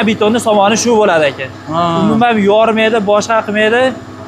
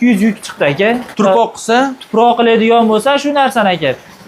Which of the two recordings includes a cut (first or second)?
second